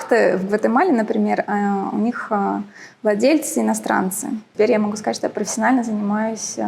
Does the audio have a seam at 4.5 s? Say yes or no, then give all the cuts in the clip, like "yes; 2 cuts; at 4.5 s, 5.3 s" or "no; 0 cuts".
yes; 1 cut; at 4.5 s